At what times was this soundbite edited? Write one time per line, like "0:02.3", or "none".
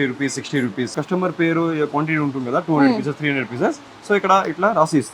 0:00.9